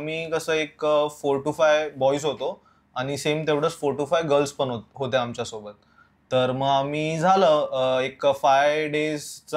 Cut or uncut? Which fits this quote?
uncut